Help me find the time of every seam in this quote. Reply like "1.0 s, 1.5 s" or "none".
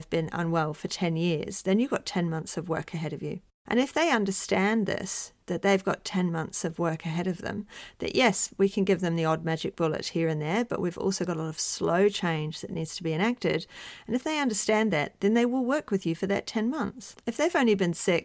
3.5 s, 17.1 s